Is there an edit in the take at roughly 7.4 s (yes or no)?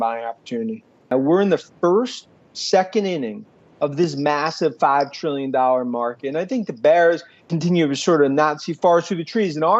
yes